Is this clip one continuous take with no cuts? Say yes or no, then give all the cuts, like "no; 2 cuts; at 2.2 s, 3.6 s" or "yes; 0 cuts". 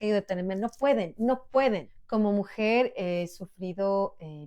no; 1 cut; at 1.9 s